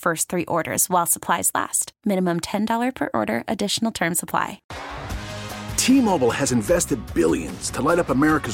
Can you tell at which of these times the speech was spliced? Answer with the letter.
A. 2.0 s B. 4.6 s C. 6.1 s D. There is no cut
B